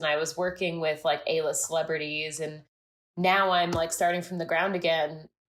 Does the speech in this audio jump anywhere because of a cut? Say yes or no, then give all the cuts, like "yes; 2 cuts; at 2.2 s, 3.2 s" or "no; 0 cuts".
no; 0 cuts